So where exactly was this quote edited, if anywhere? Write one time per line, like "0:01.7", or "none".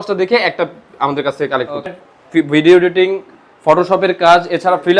0:02.0